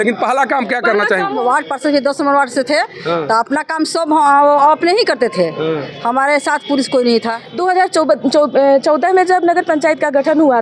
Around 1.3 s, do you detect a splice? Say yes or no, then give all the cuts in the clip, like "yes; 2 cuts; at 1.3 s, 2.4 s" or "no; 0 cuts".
yes; 2 cuts; at 1.3 s, 7.4 s